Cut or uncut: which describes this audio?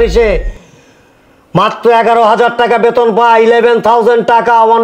uncut